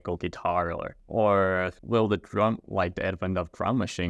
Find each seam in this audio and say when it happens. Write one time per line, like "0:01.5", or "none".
0:01.0
0:01.8